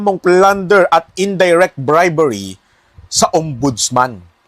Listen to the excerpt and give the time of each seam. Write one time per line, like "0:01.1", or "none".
0:00.9